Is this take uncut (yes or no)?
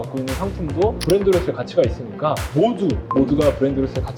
no